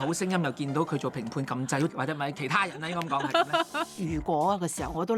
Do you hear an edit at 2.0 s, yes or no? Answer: no